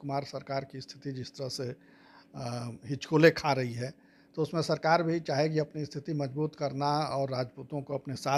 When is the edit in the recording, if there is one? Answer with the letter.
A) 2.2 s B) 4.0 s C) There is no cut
C